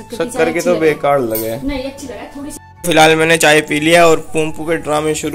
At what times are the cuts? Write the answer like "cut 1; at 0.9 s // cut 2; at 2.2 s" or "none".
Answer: cut 1; at 2.6 s